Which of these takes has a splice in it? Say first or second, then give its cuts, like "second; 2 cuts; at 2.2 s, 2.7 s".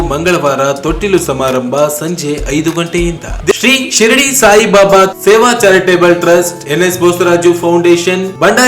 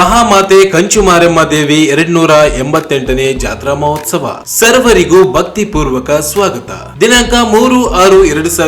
first; 1 cut; at 3.5 s